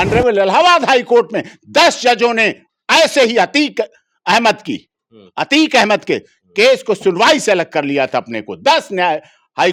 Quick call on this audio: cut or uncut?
uncut